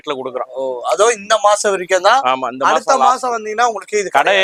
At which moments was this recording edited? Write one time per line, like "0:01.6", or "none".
none